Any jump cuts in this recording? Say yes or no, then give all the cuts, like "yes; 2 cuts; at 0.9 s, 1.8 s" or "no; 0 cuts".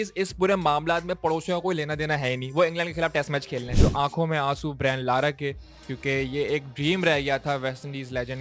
yes; 1 cut; at 3.7 s